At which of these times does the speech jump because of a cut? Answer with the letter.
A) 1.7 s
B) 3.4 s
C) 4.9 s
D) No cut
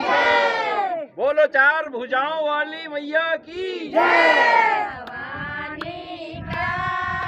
C